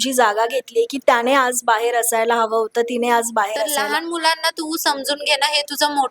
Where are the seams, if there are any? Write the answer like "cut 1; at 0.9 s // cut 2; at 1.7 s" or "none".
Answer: cut 1; at 3.8 s